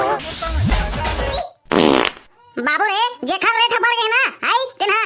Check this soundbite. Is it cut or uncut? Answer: cut